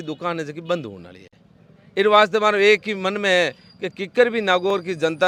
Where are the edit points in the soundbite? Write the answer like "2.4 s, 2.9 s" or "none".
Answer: none